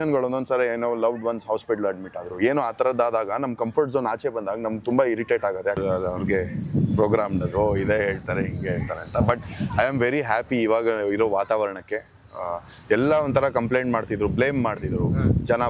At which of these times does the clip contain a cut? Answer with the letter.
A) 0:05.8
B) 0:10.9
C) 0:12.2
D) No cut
A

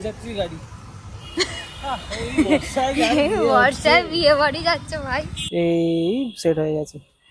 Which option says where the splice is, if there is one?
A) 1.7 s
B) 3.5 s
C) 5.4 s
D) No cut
C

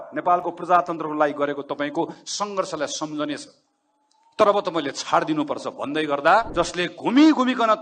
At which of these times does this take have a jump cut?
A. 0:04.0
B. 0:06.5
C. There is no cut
B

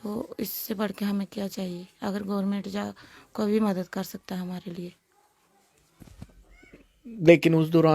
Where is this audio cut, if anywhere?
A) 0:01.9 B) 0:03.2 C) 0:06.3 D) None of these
C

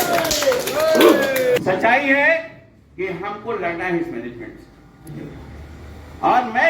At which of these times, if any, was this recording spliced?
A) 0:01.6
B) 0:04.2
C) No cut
A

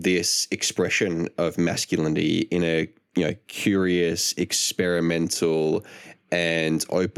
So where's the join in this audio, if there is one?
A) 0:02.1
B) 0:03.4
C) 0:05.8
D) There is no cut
D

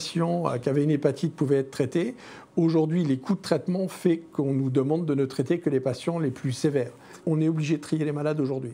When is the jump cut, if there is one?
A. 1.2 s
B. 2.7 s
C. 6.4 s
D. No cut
D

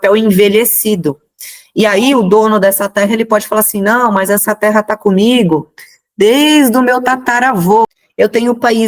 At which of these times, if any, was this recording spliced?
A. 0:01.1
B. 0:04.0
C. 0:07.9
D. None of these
C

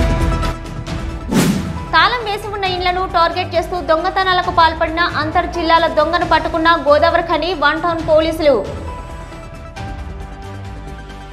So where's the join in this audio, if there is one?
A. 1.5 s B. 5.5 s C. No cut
A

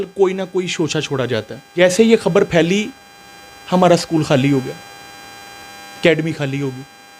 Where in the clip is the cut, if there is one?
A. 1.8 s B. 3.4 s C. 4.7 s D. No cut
A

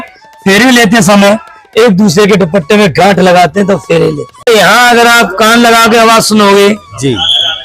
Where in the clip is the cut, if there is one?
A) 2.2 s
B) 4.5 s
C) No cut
B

